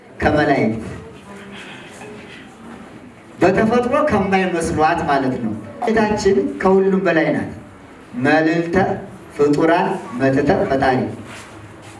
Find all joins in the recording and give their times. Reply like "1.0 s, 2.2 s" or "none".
5.9 s